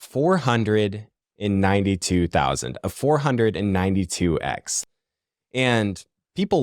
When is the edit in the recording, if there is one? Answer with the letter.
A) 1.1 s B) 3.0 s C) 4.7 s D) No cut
C